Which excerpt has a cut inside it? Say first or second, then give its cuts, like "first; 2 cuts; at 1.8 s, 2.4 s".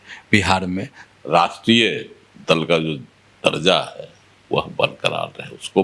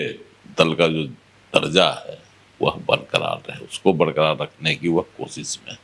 first; 1 cut; at 0.9 s